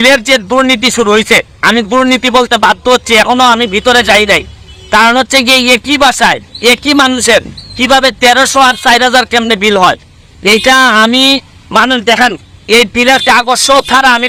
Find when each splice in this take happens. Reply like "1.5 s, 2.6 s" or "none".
none